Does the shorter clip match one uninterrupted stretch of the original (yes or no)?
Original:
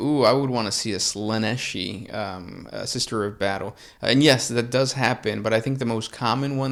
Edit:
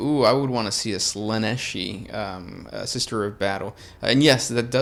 yes